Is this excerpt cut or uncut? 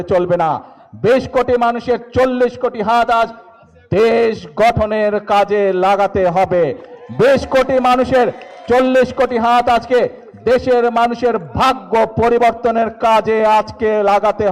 uncut